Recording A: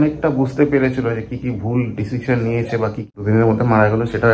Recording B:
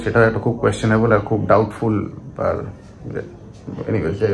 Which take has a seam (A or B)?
A